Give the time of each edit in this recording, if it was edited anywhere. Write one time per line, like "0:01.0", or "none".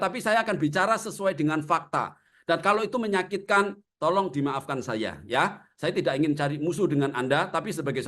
none